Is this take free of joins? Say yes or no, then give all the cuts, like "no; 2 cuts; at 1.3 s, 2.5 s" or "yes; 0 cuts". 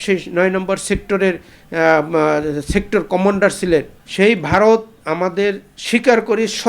no; 1 cut; at 4.0 s